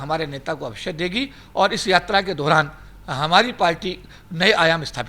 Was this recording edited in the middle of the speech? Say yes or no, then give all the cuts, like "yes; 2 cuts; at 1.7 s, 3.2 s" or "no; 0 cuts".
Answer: no; 0 cuts